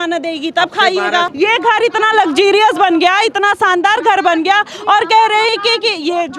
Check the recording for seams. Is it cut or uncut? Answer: cut